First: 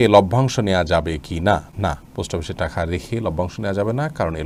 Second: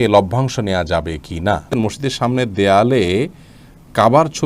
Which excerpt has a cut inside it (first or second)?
second